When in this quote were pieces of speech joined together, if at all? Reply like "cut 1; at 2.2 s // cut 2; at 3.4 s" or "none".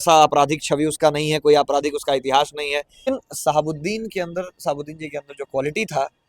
cut 1; at 3.1 s